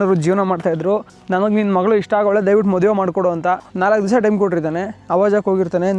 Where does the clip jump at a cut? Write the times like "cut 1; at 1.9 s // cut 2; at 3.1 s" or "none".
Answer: cut 1; at 1.1 s // cut 2; at 3.7 s